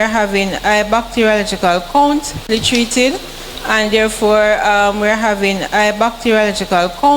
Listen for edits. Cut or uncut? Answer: cut